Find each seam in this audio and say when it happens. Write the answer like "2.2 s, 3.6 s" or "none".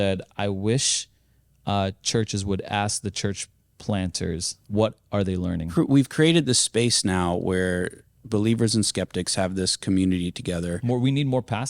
4.6 s, 5.7 s, 10.8 s